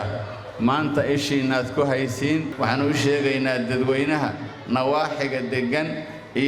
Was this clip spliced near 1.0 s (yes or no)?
no